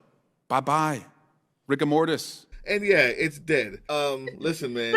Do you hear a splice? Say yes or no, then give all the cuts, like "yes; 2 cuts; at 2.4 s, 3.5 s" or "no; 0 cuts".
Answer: yes; 1 cut; at 3.8 s